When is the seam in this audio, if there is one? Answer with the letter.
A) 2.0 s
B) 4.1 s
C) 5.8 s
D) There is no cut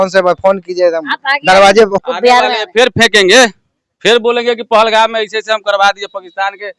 A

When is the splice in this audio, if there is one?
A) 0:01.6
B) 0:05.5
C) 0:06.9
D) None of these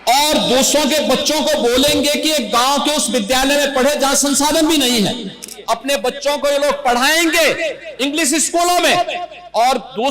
B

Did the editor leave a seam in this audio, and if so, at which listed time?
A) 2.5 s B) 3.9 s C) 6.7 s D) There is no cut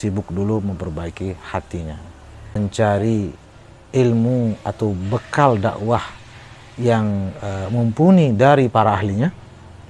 A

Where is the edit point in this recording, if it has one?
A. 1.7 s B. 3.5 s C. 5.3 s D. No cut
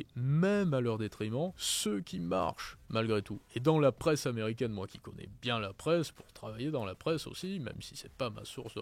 A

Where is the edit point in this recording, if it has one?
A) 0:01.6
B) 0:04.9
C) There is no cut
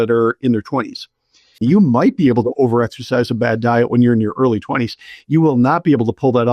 A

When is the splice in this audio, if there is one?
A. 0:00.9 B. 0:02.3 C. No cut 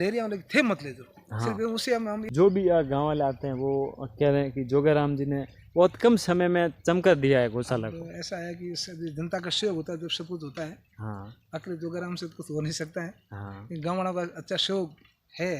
B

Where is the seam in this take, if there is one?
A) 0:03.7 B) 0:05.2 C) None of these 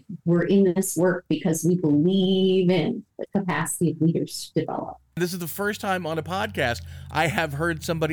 B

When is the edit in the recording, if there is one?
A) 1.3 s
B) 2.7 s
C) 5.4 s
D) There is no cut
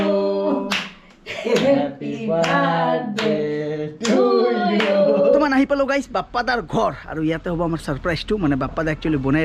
C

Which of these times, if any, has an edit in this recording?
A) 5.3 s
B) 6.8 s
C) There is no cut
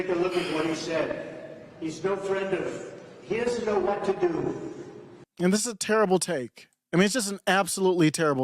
A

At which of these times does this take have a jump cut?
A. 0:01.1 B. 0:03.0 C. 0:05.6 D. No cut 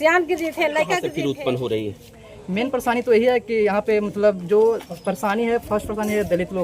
A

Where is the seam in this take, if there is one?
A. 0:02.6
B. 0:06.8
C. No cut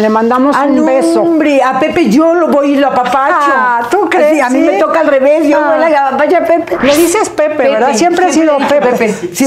B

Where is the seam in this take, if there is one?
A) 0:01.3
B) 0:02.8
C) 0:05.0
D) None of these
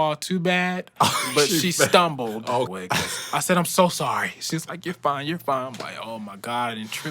B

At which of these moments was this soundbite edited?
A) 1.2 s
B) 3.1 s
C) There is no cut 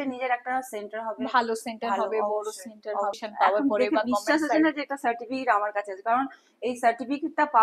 B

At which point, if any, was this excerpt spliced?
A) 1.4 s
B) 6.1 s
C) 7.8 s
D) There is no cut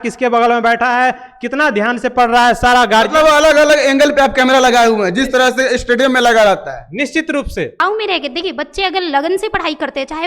C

